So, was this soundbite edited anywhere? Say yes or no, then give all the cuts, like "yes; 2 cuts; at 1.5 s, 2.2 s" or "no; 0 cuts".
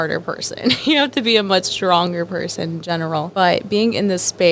yes; 1 cut; at 3.3 s